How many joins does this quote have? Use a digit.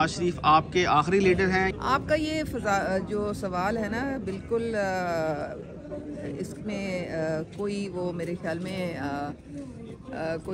1